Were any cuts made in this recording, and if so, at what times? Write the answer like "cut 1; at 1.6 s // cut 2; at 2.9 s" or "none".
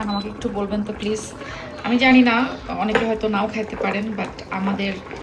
none

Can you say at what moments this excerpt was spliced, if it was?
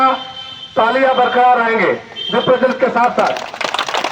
none

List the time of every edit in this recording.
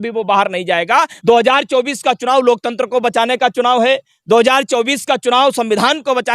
cut 1; at 1.1 s

